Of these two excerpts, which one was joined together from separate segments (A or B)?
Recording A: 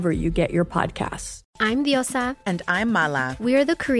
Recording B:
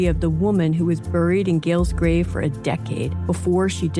A